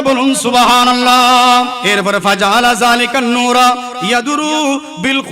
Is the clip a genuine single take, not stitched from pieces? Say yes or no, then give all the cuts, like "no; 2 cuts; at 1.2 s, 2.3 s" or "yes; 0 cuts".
no; 1 cut; at 1.8 s